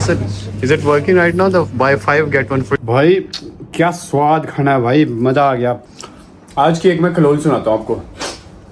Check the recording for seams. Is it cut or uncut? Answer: cut